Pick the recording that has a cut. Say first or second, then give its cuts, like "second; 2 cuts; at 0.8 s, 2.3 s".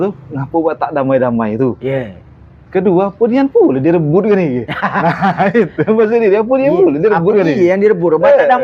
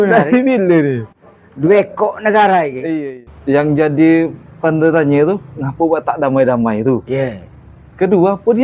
second; 1 cut; at 3.0 s